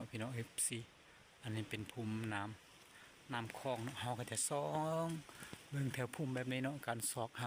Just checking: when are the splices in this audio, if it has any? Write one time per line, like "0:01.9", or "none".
none